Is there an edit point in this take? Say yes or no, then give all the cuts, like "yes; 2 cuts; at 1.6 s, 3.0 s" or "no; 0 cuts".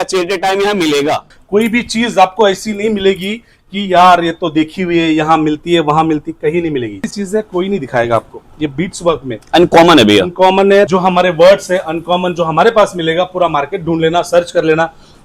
yes; 3 cuts; at 1.3 s, 7.0 s, 10.9 s